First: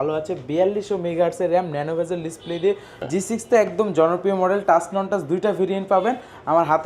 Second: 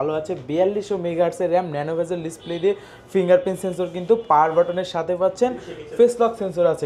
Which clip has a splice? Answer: first; 1 cut; at 2.9 s

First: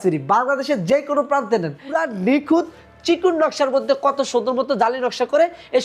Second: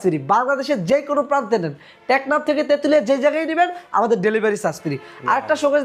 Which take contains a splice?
first; 1 cut; at 1.9 s

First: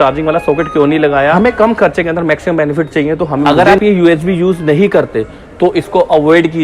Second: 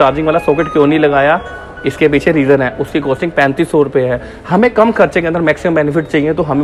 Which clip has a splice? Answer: first; 2 cuts; at 1.3 s, 3.5 s

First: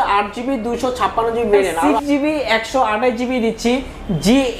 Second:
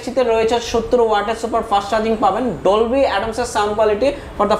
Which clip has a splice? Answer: first; 1 cut; at 1.8 s

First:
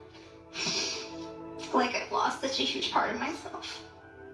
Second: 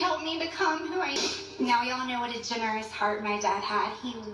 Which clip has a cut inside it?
second; 1 cut; at 1.1 s

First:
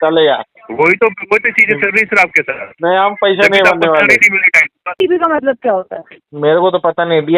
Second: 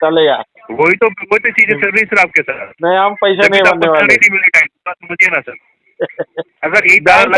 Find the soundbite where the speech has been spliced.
first; 1 cut; at 4.9 s

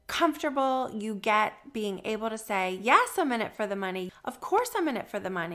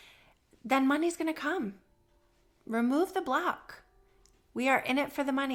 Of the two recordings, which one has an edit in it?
first; 1 cut; at 4.1 s

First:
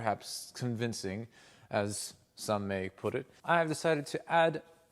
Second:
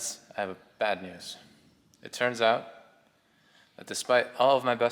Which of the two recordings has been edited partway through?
first; 1 cut; at 3.3 s

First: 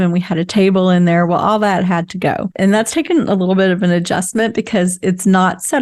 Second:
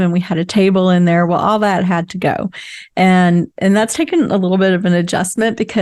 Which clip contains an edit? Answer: first; 1 cut; at 2.5 s

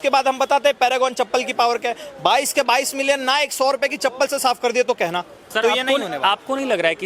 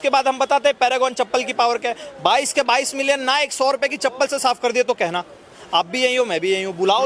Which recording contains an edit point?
first; 1 cut; at 5.4 s

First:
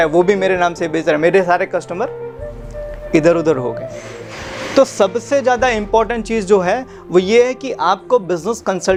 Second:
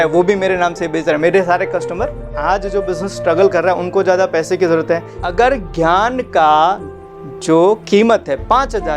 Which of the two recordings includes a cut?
second; 2 cuts; at 2.4 s, 5.1 s

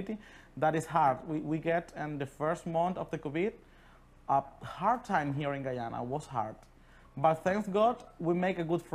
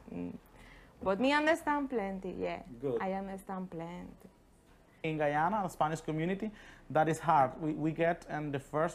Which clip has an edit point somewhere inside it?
second; 1 cut; at 5.0 s

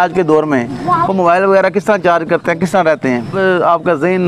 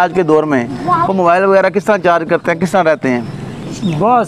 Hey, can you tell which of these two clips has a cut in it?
first; 1 cut; at 3.3 s

